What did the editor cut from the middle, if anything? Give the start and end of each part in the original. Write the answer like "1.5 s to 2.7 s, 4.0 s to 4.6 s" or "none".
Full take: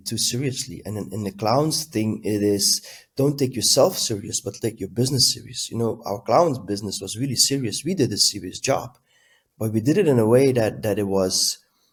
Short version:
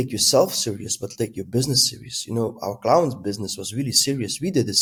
none